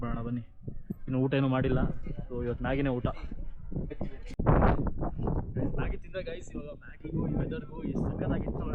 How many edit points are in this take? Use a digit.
0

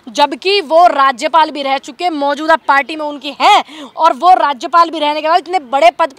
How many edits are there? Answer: 0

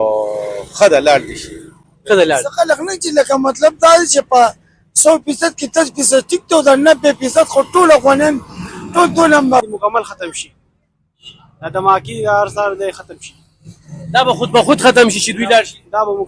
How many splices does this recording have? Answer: 1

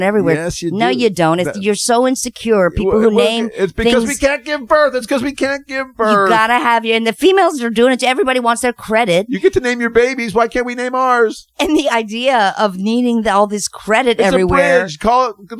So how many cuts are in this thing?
0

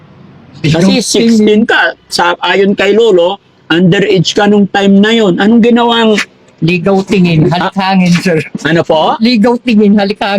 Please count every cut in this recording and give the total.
0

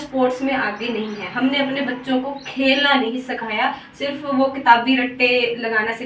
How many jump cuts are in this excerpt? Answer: 0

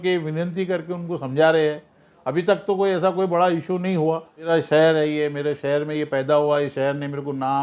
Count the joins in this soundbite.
1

